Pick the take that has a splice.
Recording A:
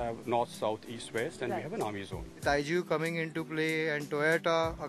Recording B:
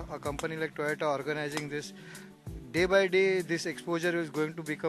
A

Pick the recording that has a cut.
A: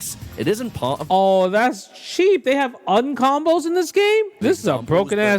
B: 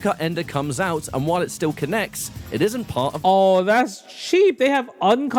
A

